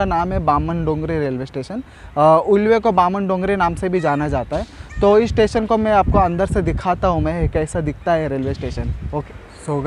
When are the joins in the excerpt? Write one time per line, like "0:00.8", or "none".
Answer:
none